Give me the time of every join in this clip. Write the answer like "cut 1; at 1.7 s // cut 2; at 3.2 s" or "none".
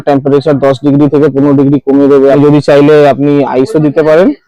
cut 1; at 2.4 s